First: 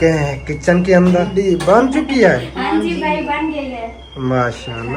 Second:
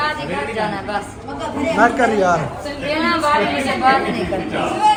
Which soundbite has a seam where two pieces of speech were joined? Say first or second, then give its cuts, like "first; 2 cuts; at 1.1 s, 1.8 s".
first; 1 cut; at 1.3 s